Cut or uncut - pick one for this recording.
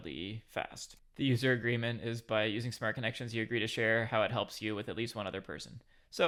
uncut